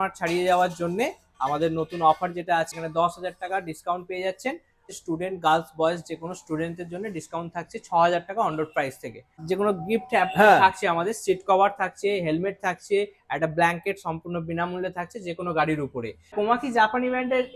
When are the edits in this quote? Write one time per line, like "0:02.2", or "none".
0:02.7
0:04.8
0:09.4
0:16.3